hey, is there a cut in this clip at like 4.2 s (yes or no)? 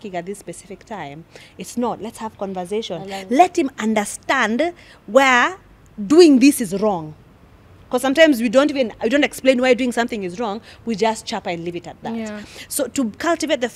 no